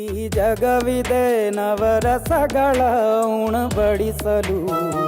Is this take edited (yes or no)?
yes